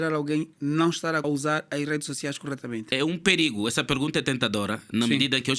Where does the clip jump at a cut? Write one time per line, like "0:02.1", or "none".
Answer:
0:01.2
0:02.9